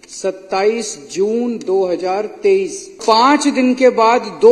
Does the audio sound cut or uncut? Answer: cut